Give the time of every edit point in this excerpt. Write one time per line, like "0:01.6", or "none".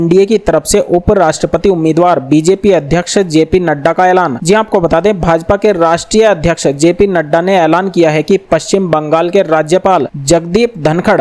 none